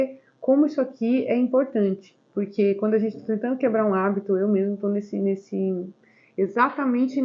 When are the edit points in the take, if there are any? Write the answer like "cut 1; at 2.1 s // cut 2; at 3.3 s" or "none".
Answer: none